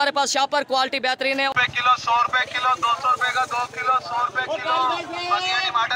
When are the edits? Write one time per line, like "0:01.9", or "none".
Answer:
0:01.6